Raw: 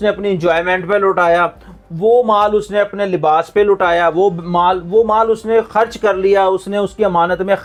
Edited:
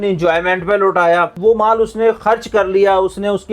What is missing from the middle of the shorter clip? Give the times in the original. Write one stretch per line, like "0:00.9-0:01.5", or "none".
0:01.6-0:04.8